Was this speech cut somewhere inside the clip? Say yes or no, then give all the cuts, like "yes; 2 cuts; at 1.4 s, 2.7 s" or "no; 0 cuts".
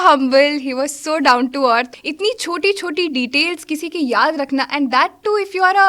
yes; 1 cut; at 1.9 s